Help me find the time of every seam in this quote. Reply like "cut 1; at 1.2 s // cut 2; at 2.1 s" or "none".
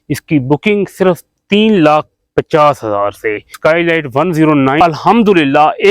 cut 1; at 3.5 s // cut 2; at 4.8 s